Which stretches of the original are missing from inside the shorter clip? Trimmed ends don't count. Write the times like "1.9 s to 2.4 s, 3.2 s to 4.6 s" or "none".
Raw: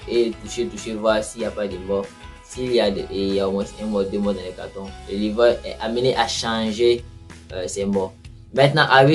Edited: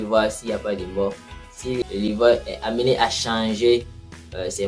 2.7 s to 5.0 s